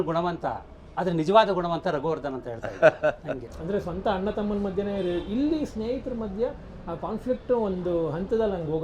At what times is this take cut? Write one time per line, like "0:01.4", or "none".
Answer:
0:03.5